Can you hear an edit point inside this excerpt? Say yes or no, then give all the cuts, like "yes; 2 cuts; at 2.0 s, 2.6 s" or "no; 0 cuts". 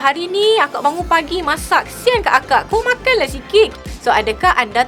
yes; 1 cut; at 3.8 s